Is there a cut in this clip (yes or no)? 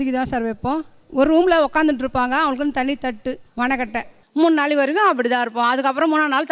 no